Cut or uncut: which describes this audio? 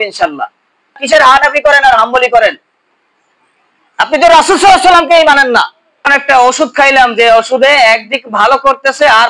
cut